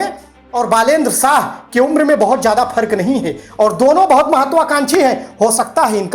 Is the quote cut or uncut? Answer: uncut